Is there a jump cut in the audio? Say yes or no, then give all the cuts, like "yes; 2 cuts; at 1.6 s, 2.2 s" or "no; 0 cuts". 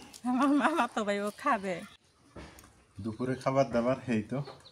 yes; 1 cut; at 1.9 s